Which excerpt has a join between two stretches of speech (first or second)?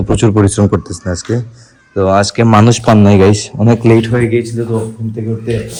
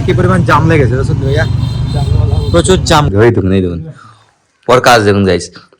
second